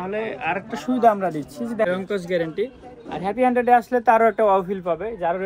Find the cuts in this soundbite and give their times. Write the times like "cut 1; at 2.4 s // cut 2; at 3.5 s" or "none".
cut 1; at 1.9 s